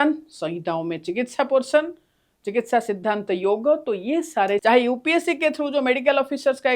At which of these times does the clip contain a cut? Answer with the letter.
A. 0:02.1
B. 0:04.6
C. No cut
B